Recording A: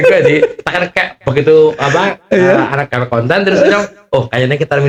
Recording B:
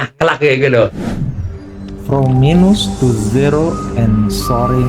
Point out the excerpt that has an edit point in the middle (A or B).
B